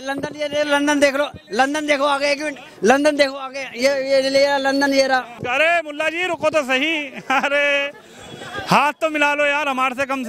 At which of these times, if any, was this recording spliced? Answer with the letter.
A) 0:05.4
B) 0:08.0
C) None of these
A